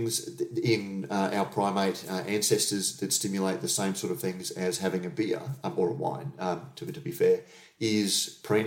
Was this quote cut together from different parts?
no; 0 cuts

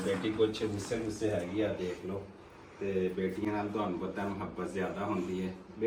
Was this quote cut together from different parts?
no; 0 cuts

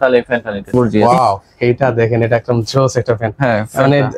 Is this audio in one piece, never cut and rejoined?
no; 1 cut; at 0.9 s

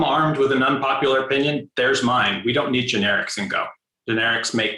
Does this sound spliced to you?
yes; 1 cut; at 3.9 s

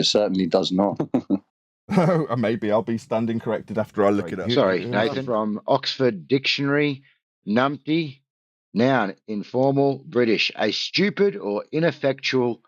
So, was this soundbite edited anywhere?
yes; 3 cuts; at 1.0 s, 4.3 s, 5.2 s

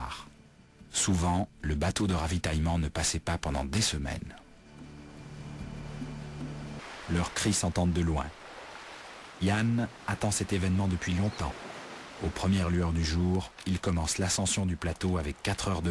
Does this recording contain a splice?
yes; 1 cut; at 6.8 s

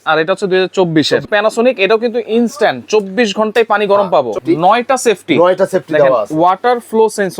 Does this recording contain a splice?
yes; 2 cuts; at 1.3 s, 4.3 s

